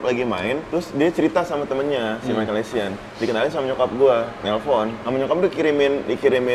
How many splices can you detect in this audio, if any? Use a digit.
1